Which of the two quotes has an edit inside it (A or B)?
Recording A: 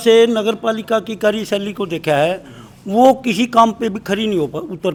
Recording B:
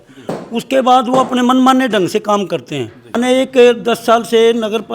B